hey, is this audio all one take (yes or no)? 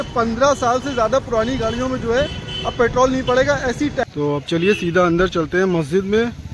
no